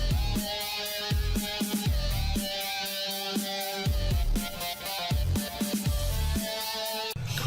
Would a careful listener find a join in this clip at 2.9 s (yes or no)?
yes